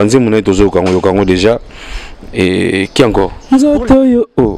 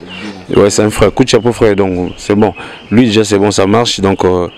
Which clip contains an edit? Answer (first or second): first